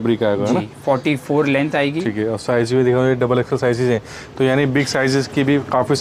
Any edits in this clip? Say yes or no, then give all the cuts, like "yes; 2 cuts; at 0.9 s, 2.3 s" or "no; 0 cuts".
no; 0 cuts